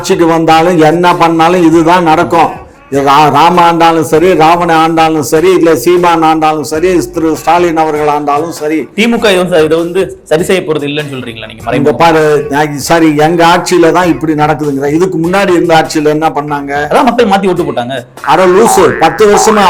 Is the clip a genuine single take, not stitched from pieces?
yes; 0 cuts

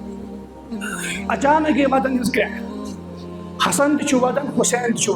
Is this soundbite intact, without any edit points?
no; 1 cut; at 1.3 s

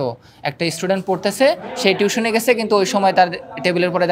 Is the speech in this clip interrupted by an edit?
no; 0 cuts

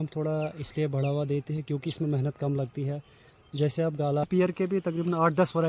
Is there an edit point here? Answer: yes; 1 cut; at 4.3 s

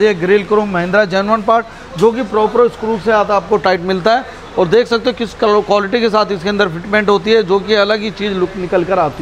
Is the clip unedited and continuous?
yes; 0 cuts

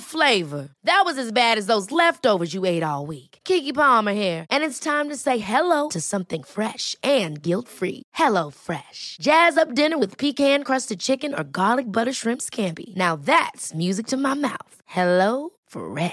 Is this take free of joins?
yes; 0 cuts

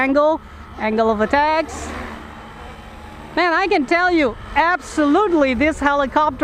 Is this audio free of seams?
yes; 0 cuts

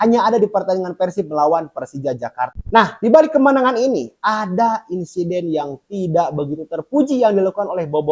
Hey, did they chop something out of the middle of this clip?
yes; 1 cut; at 2.5 s

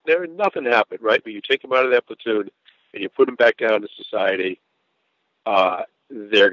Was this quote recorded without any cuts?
yes; 0 cuts

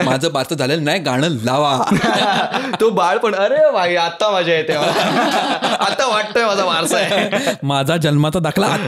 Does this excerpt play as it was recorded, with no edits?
yes; 0 cuts

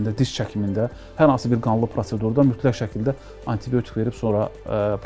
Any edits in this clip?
no; 0 cuts

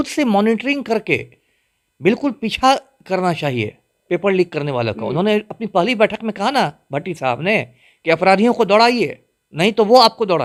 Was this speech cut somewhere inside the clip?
no; 0 cuts

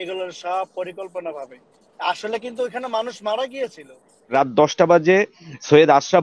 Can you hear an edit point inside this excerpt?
yes; 1 cut; at 4.3 s

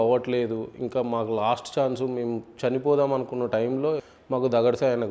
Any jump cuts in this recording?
yes; 1 cut; at 4.0 s

